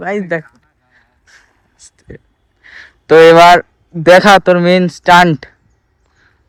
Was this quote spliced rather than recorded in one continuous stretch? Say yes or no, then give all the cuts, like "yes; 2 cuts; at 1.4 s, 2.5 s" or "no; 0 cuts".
no; 0 cuts